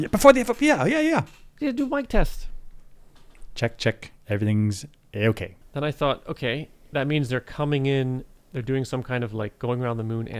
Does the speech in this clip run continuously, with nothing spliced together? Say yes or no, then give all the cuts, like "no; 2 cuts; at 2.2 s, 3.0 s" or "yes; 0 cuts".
no; 1 cut; at 5.6 s